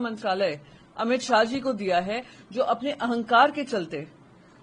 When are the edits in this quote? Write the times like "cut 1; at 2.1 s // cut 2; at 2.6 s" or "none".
none